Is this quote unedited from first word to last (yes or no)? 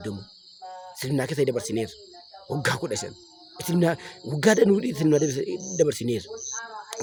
yes